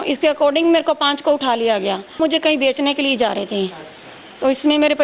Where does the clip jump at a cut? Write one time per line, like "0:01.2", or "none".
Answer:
0:02.2